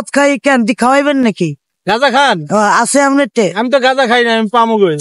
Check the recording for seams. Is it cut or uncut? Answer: uncut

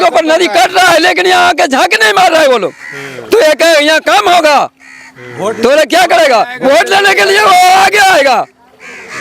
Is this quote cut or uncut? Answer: uncut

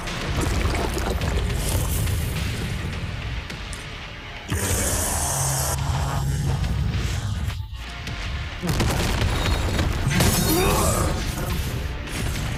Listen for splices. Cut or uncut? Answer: uncut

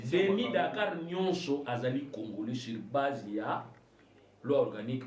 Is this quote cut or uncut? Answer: uncut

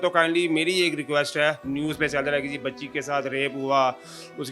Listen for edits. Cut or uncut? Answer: cut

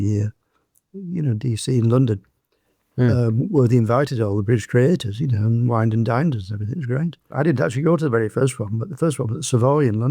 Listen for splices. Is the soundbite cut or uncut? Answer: uncut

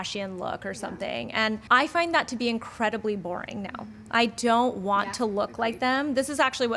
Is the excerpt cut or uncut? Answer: cut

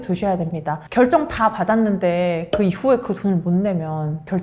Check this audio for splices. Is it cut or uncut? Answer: uncut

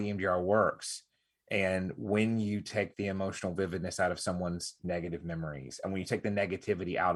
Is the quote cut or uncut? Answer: uncut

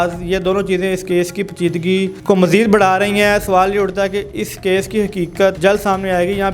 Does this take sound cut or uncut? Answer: cut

